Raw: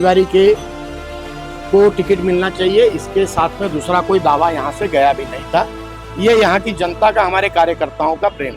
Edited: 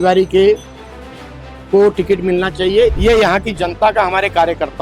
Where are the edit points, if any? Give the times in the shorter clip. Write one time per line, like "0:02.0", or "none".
0:03.0